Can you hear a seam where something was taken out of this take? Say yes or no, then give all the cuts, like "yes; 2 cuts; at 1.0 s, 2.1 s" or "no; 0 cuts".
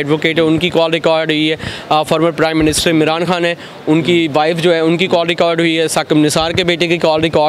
no; 0 cuts